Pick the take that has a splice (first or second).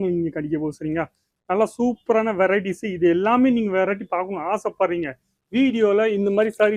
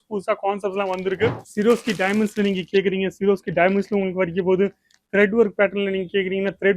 second